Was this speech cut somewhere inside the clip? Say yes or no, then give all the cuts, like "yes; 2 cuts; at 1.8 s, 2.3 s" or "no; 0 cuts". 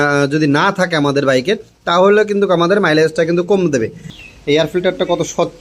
yes; 1 cut; at 4.1 s